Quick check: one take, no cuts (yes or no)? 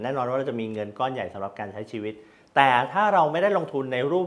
yes